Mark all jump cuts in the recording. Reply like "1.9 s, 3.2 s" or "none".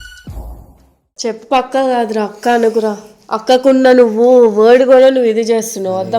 1.0 s